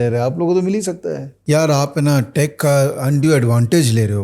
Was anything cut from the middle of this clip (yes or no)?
yes